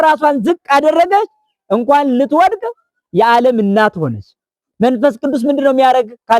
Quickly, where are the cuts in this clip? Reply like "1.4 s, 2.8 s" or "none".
4.6 s